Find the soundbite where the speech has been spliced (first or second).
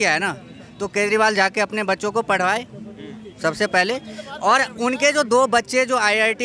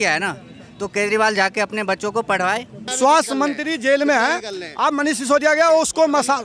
second